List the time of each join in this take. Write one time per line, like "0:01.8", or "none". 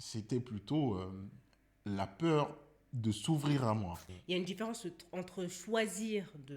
0:04.1

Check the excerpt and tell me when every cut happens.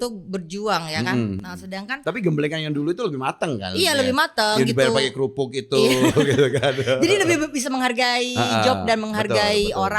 none

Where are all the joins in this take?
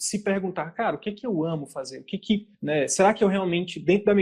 none

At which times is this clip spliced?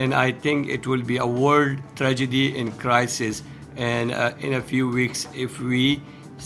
none

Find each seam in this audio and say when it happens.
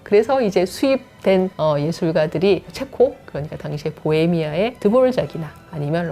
0:01.5
0:02.8
0:04.8

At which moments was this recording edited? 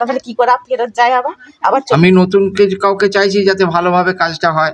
0:01.9

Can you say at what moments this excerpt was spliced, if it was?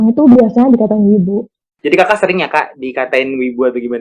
0:01.6

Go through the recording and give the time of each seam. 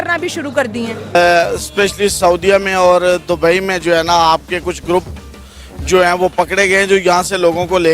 0:01.1

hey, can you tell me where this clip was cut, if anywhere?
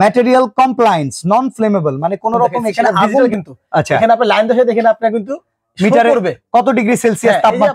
0:03.2

